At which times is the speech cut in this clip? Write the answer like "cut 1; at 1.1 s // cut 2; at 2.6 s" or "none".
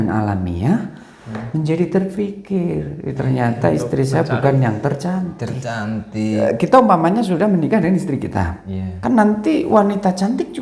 cut 1; at 6.4 s